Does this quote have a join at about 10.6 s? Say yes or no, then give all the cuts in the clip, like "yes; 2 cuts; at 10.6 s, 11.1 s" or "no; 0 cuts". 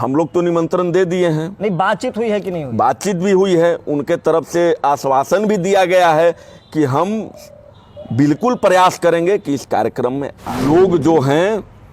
yes; 1 cut; at 10.6 s